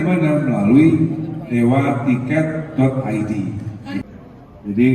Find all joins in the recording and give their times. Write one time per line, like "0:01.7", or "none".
0:04.0